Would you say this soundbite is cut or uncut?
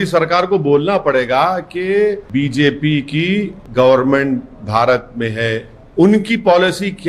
uncut